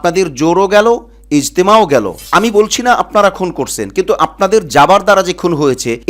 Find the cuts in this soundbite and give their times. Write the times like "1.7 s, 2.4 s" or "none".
2.2 s

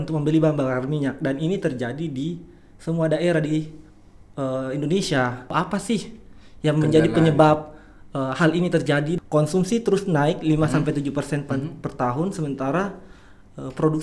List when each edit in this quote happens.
5.5 s, 9.2 s

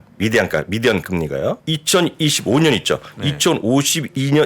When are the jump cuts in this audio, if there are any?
1.6 s

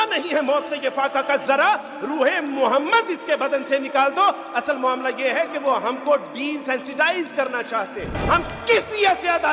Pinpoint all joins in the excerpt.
8.1 s

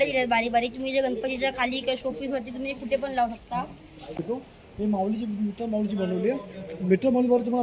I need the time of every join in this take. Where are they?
4.2 s

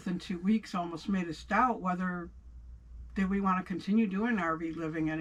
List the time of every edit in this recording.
none

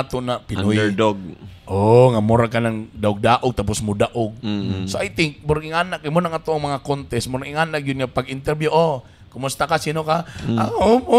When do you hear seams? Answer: none

